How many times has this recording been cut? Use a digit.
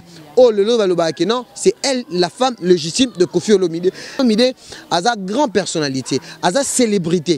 1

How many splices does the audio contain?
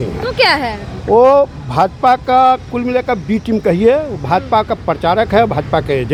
0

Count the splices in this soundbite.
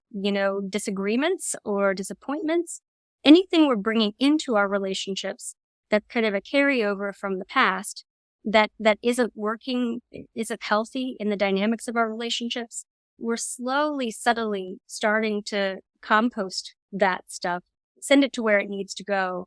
2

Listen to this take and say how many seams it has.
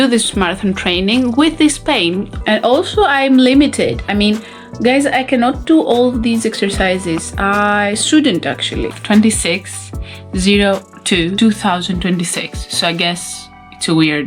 2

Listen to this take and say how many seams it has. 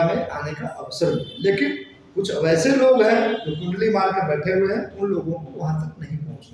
0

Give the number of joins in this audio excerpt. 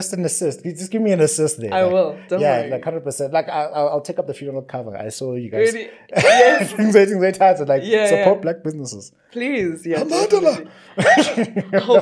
0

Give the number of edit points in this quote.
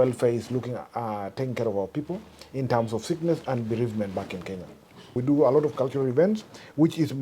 1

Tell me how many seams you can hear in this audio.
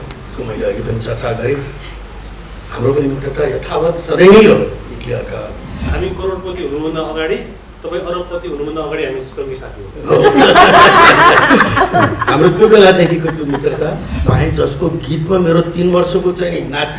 2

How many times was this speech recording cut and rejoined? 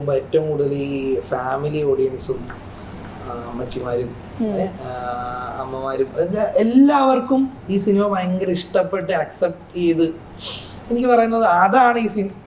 0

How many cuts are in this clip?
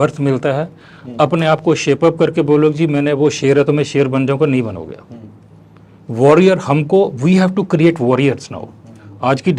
0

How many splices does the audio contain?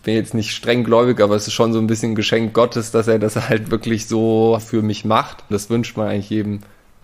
2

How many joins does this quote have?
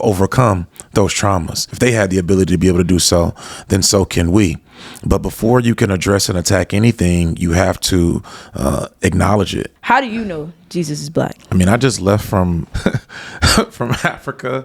3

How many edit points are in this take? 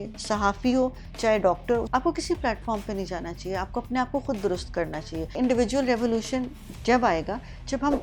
2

